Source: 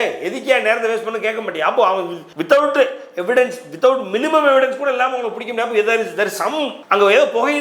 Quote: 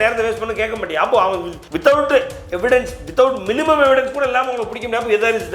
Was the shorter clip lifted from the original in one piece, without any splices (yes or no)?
yes